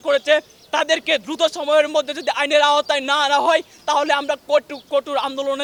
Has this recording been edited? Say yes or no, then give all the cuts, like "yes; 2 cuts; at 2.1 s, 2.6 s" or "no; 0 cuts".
no; 0 cuts